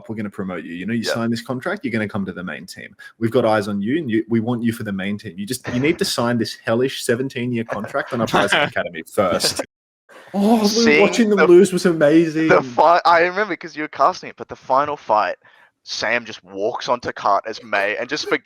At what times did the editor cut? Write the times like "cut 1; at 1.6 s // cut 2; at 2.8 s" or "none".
cut 1; at 9.8 s